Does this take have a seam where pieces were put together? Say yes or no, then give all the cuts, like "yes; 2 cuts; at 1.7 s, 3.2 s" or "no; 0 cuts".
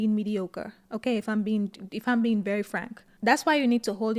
no; 0 cuts